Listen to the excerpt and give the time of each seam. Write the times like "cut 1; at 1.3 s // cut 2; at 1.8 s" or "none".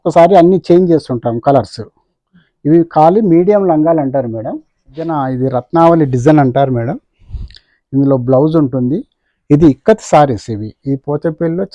cut 1; at 5.1 s

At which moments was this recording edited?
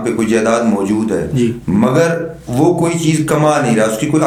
none

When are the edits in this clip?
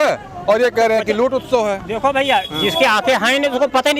none

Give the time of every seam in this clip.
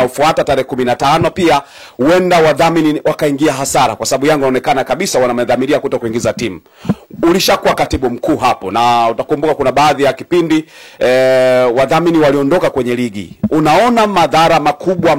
none

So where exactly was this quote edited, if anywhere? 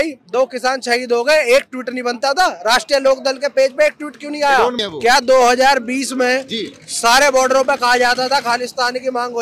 cut 1; at 4.9 s

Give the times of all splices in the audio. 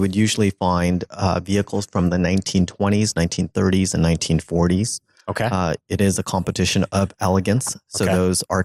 none

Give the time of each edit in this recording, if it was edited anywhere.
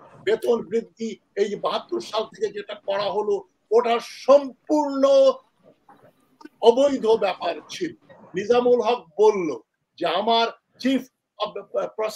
cut 1; at 8.2 s

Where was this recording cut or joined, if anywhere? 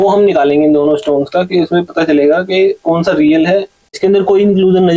cut 1; at 3.9 s

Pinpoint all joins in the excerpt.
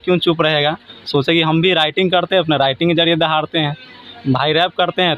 none

